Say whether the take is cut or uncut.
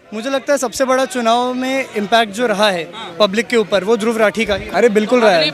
cut